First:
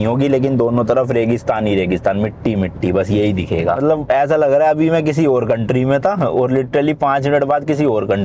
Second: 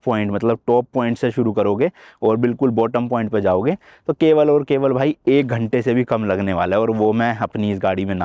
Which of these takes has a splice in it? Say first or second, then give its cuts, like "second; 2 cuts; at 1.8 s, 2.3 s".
first; 1 cut; at 3.8 s